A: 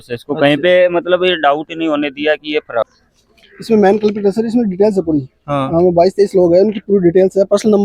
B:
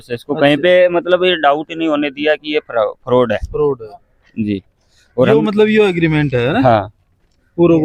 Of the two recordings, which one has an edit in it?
A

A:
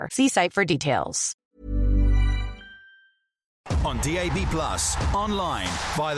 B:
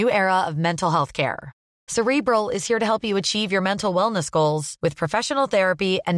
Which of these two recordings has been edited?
A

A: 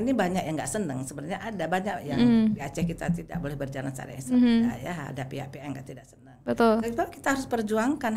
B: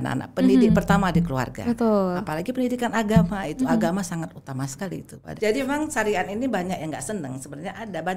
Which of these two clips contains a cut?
B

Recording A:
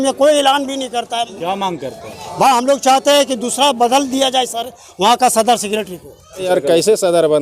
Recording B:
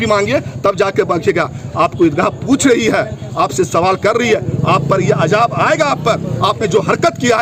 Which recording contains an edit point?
A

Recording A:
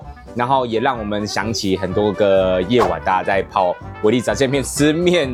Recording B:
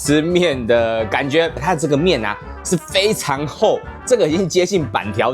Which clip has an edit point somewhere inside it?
B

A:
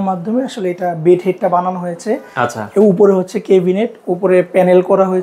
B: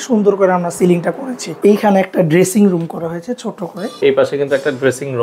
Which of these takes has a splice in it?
B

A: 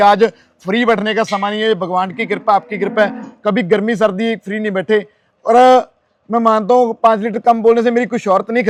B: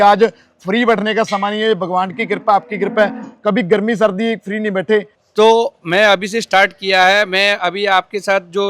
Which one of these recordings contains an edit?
B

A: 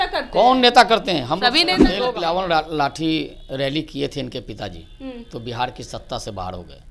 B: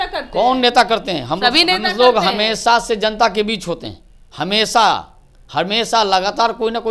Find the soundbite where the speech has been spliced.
A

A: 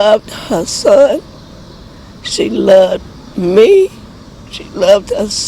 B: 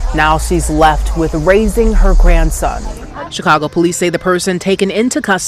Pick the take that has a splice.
B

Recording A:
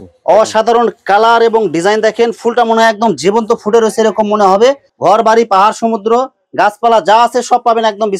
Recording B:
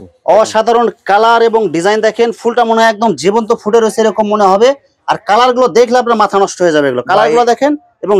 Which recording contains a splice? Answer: A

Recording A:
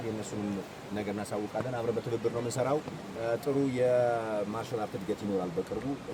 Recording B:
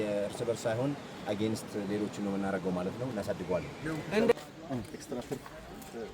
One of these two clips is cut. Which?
B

